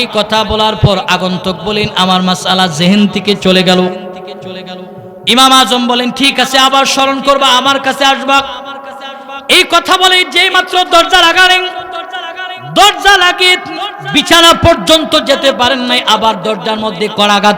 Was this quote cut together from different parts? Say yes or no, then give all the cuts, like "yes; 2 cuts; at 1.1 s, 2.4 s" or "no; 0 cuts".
no; 0 cuts